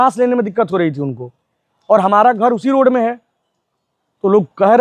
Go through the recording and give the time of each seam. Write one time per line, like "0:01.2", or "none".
none